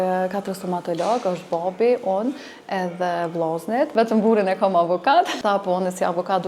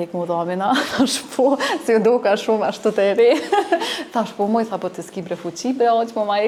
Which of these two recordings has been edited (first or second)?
first